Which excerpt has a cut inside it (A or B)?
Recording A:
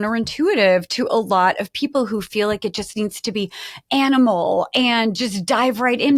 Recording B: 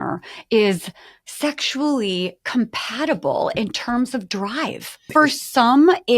B